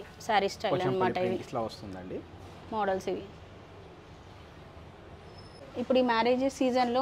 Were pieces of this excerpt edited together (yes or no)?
no